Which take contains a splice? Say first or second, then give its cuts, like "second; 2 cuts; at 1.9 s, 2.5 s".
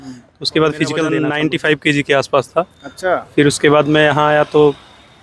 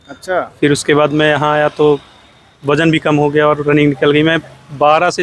first; 1 cut; at 1.1 s